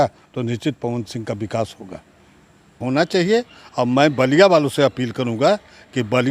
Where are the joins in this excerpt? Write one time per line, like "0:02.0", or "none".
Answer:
0:02.8